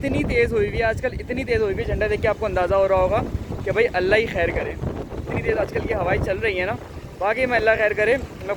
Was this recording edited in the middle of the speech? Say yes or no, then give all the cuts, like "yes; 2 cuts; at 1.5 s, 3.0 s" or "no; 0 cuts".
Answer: no; 0 cuts